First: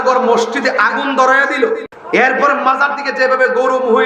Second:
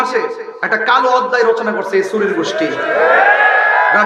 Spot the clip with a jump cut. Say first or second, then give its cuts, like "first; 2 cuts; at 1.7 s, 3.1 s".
first; 1 cut; at 1.9 s